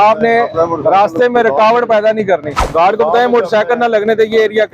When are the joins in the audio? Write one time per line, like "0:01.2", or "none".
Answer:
0:02.6